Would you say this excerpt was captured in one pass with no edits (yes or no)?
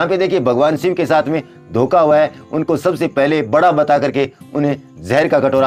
yes